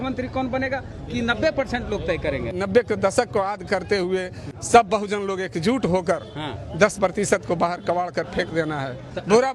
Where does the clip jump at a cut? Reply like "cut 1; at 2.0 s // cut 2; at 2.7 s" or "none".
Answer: cut 1; at 2.5 s